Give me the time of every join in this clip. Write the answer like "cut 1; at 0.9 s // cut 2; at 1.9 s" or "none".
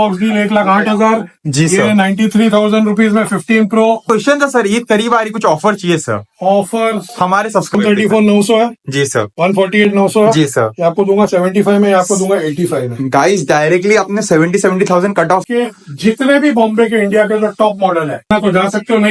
cut 1; at 4.0 s // cut 2; at 7.7 s // cut 3; at 15.4 s // cut 4; at 18.3 s